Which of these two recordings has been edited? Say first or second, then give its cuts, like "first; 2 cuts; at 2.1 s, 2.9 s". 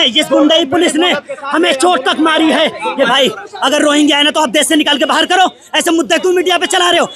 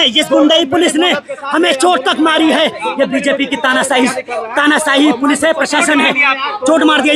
first; 1 cut; at 3.1 s